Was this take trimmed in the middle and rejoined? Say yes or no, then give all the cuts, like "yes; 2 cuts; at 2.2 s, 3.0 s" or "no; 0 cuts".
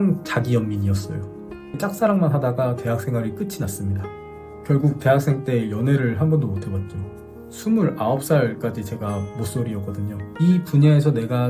yes; 2 cuts; at 1.8 s, 10.2 s